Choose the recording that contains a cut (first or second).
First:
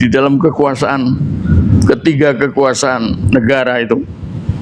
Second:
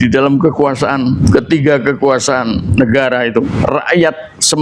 second